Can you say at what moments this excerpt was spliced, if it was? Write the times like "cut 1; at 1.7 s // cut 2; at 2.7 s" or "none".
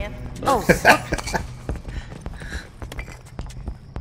cut 1; at 2.8 s